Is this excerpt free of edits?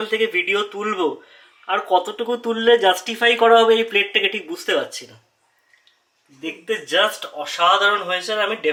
yes; 0 cuts

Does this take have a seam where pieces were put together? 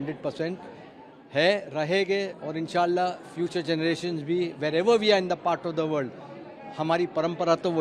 no; 0 cuts

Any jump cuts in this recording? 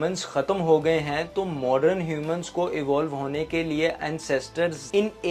no; 0 cuts

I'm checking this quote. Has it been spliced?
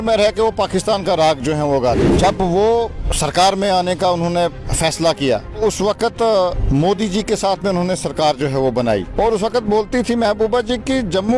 yes; 6 cuts; at 2.1 s, 3.0 s, 4.7 s, 5.6 s, 6.6 s, 9.1 s

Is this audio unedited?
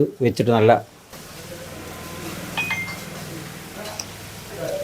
no; 1 cut; at 1.2 s

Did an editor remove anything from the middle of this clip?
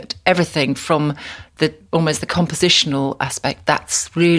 no; 0 cuts

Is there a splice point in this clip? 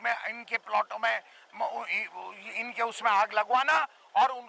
no; 0 cuts

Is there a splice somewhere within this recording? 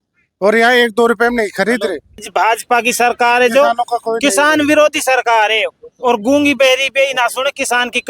yes; 1 cut; at 2.2 s

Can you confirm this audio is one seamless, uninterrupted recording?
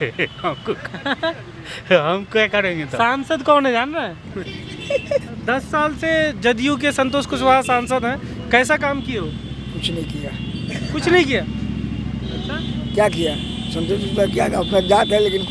no; 1 cut; at 4.3 s

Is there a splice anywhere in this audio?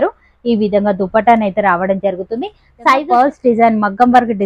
yes; 1 cut; at 3.0 s

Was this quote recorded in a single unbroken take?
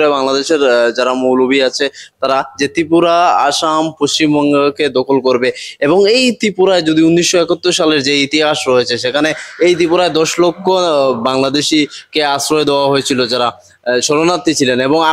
yes; 0 cuts

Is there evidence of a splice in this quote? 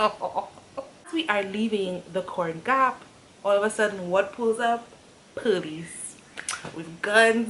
yes; 1 cut; at 1.1 s

